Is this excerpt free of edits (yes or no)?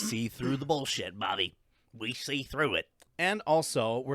no